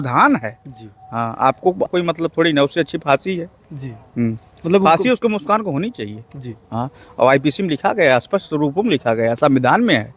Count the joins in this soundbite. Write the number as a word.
one